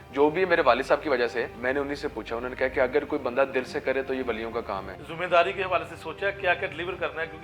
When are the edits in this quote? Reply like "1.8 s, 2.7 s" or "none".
1.5 s, 5.2 s